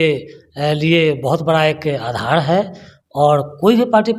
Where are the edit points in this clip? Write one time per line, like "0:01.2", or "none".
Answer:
none